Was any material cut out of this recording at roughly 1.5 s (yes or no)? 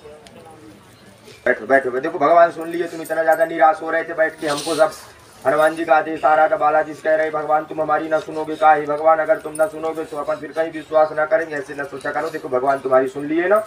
yes